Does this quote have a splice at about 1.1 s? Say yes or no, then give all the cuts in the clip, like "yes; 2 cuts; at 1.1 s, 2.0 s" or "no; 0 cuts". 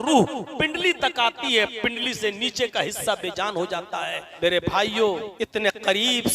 no; 2 cuts; at 4.2 s, 5.3 s